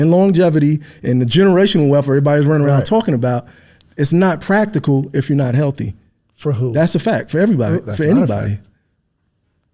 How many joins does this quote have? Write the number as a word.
zero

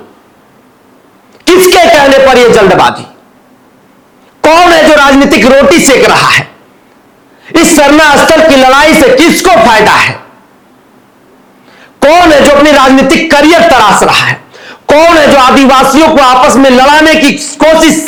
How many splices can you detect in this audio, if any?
zero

